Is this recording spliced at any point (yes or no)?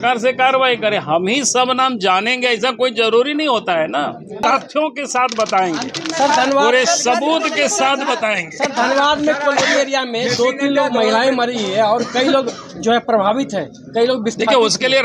yes